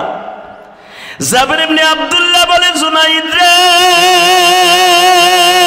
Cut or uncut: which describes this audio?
uncut